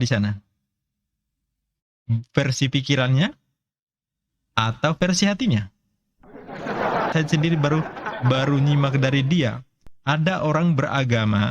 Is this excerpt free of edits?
no; 1 cut; at 7.1 s

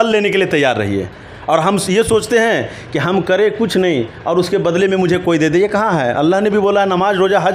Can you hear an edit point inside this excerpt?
no; 0 cuts

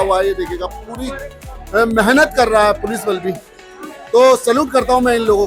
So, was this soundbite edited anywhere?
no; 0 cuts

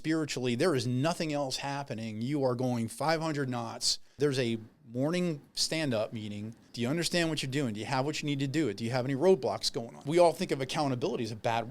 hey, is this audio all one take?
no; 3 cuts; at 4.1 s, 6.6 s, 10.0 s

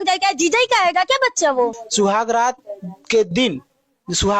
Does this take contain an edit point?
yes; 1 cut; at 1.7 s

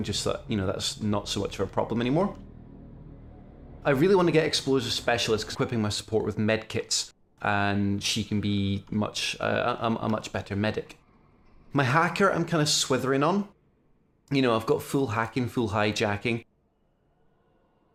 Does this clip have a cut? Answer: no; 0 cuts

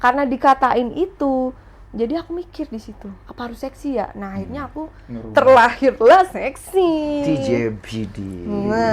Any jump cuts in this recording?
no; 0 cuts

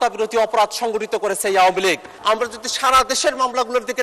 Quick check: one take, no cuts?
no; 1 cut; at 2.1 s

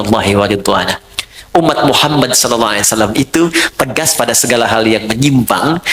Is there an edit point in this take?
no; 0 cuts

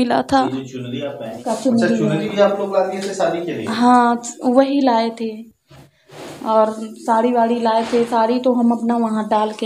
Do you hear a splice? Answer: yes; 1 cut; at 1.4 s

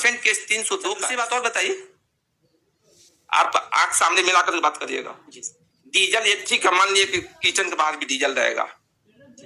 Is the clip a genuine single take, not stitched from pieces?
no; 1 cut; at 1.1 s

